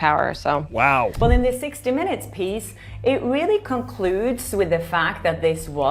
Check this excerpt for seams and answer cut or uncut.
cut